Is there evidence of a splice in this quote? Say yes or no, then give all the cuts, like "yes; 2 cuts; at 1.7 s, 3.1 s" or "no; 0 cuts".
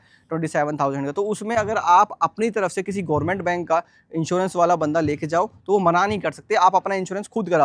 no; 0 cuts